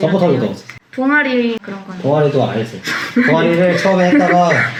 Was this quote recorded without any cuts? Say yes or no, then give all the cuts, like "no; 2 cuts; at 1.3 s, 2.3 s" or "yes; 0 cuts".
yes; 0 cuts